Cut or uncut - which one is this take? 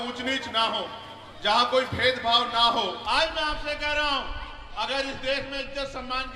cut